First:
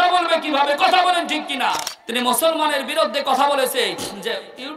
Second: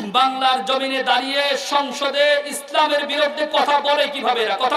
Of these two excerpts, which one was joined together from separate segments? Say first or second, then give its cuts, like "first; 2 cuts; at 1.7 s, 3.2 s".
first; 1 cut; at 1.9 s